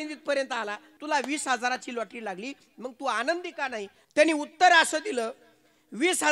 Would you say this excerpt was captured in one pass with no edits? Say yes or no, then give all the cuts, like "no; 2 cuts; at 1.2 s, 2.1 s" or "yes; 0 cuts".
no; 2 cuts; at 0.9 s, 4.0 s